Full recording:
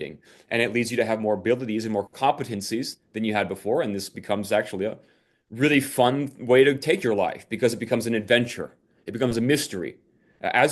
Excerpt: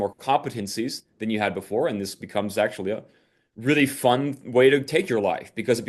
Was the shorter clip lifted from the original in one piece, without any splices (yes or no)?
yes